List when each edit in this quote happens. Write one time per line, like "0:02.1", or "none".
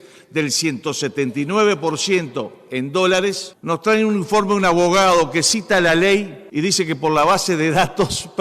0:03.5
0:06.4